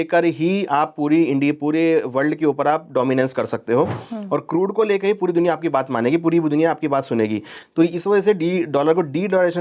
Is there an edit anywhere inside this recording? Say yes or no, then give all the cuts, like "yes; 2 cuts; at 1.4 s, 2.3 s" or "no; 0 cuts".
no; 0 cuts